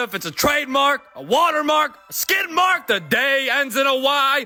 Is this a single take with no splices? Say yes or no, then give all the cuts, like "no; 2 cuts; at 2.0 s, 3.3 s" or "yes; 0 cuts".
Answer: yes; 0 cuts